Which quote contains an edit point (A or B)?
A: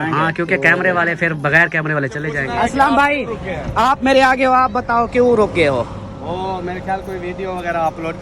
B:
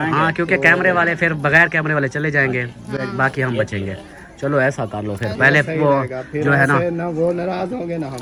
A